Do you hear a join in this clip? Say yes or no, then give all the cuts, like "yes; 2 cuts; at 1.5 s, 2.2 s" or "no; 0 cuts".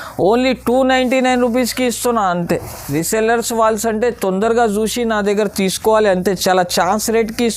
yes; 1 cut; at 2.8 s